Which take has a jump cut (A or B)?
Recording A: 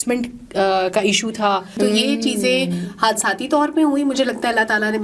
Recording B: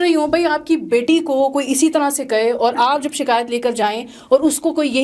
A